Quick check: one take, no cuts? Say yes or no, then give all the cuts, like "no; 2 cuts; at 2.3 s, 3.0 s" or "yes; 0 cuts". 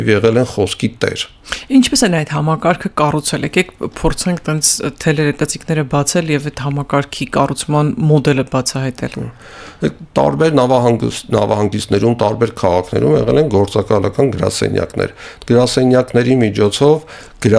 yes; 0 cuts